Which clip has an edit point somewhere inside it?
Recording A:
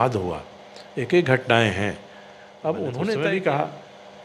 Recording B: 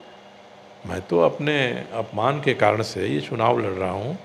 A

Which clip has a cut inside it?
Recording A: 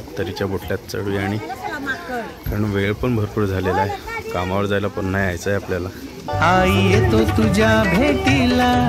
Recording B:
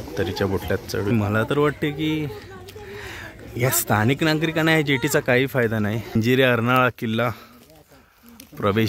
B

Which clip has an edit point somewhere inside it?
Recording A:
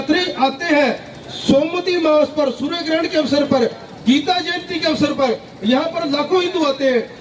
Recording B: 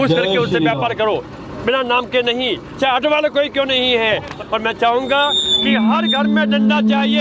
B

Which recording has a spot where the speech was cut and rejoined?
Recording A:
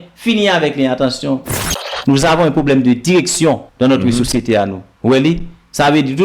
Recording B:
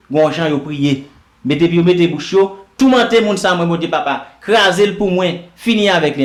A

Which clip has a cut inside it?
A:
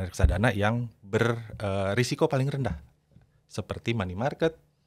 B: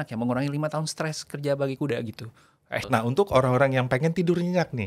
B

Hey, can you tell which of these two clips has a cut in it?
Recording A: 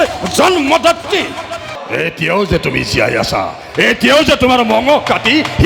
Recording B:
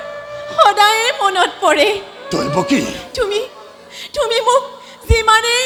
A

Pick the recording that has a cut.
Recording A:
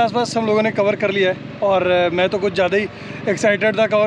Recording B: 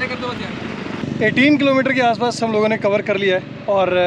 B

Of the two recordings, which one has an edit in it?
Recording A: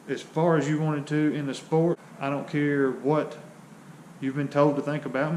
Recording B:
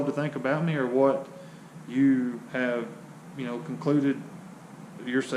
A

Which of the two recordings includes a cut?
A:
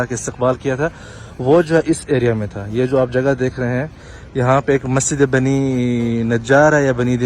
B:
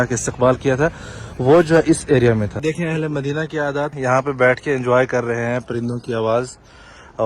B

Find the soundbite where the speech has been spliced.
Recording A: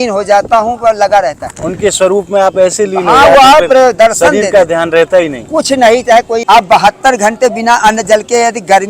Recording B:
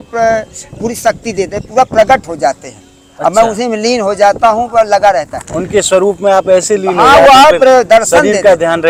A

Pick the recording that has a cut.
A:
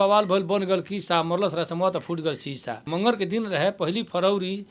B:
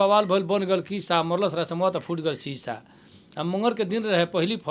A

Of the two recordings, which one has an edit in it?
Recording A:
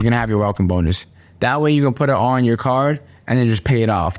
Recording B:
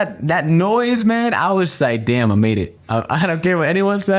B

